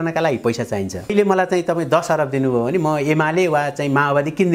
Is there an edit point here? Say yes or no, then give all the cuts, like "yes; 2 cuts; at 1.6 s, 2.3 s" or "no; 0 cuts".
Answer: yes; 1 cut; at 1.1 s